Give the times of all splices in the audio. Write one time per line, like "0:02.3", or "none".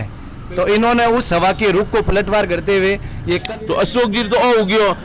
0:03.4